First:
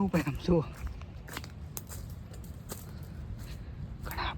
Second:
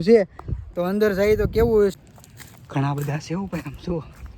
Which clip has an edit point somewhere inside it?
second; 1 cut; at 1.9 s

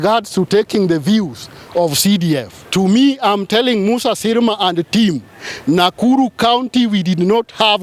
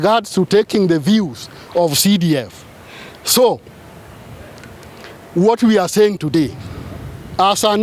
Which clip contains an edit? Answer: first; 1 cut; at 2.6 s

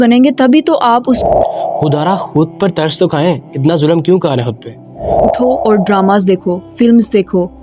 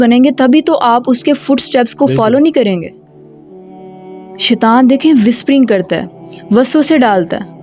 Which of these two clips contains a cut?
first; 2 cuts; at 1.2 s, 5.3 s

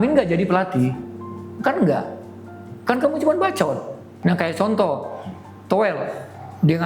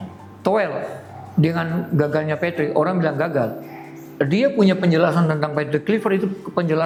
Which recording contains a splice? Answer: first; 1 cut; at 4.1 s

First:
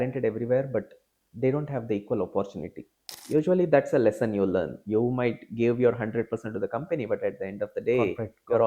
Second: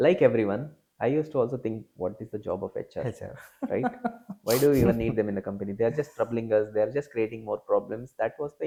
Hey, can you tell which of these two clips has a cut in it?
first; 1 cut; at 3.1 s

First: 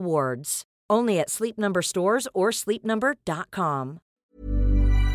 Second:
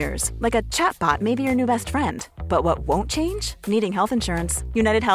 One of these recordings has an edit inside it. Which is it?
first; 1 cut; at 4.1 s

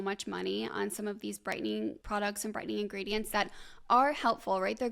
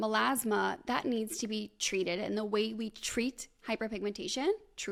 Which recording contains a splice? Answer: first; 1 cut; at 2.0 s

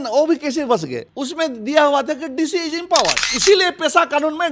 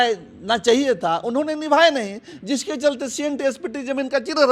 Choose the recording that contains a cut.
first; 1 cut; at 1.0 s

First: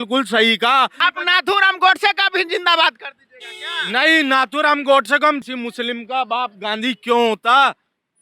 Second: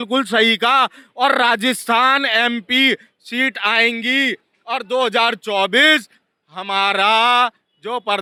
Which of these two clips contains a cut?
first; 2 cuts; at 1.0 s, 5.4 s

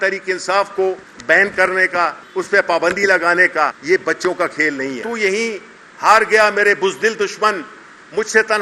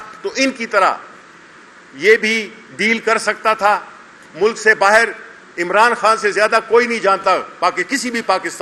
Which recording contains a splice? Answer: first; 4 cuts; at 1.1 s, 2.2 s, 3.8 s, 5.0 s

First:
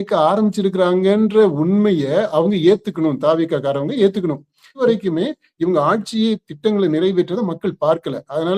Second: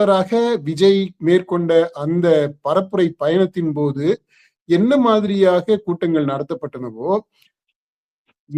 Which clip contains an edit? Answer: first; 1 cut; at 4.7 s

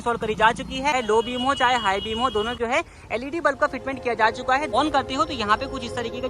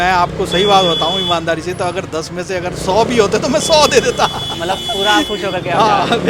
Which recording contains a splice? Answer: first; 3 cuts; at 0.9 s, 2.5 s, 4.7 s

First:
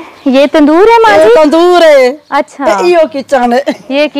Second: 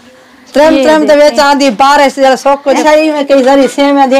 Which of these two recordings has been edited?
second; 1 cut; at 2.8 s

